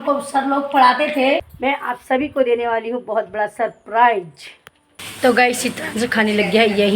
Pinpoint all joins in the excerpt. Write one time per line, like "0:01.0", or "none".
0:01.5